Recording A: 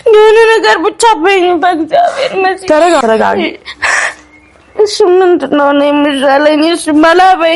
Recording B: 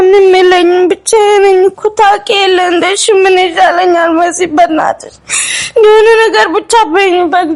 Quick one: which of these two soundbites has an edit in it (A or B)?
A